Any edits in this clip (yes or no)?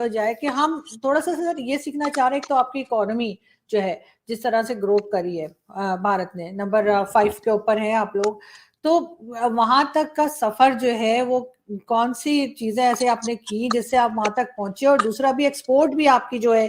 no